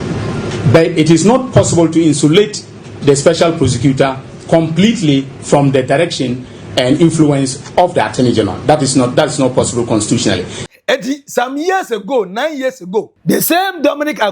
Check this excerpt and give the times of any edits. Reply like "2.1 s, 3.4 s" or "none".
10.7 s, 13.1 s